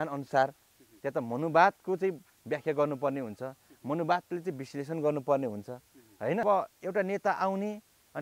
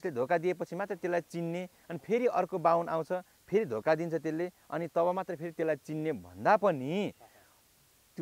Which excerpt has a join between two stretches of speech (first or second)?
first